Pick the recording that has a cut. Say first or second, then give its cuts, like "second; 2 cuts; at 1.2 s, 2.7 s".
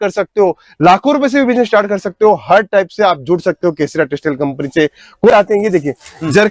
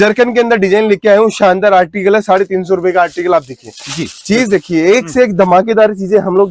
first; 1 cut; at 5.3 s